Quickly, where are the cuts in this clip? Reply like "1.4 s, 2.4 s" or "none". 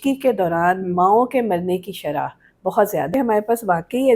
3.1 s